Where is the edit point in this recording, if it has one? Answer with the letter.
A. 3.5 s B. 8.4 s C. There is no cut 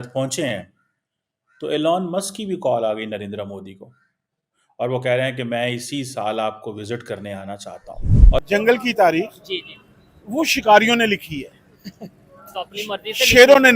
B